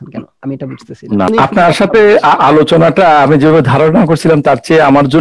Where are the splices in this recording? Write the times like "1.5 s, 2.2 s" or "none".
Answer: 1.3 s